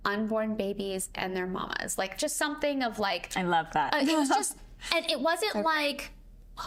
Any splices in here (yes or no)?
no